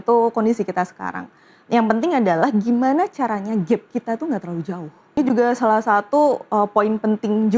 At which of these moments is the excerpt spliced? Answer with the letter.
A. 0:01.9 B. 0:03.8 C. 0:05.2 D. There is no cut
C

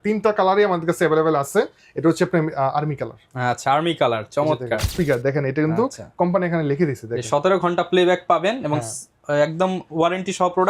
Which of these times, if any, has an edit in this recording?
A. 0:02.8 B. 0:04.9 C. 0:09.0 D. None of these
B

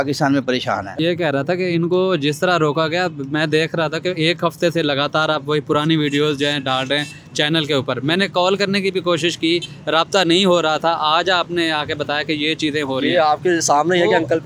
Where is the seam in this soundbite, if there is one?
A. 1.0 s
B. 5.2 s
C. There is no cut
A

